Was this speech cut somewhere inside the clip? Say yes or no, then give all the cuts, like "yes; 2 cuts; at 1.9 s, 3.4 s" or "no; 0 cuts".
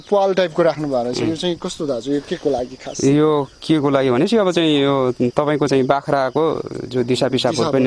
no; 0 cuts